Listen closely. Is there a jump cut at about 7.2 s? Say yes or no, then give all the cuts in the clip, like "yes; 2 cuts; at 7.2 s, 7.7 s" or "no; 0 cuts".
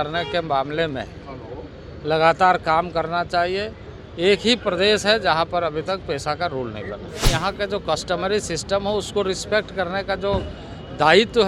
yes; 1 cut; at 7.2 s